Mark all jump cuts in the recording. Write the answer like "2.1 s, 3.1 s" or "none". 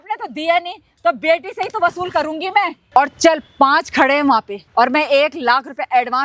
2.8 s, 4.6 s